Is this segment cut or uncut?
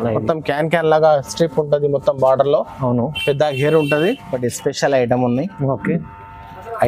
cut